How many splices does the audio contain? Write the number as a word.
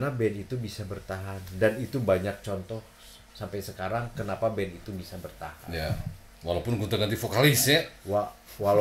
zero